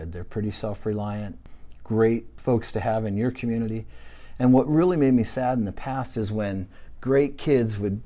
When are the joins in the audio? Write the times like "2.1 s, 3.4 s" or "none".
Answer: 2.3 s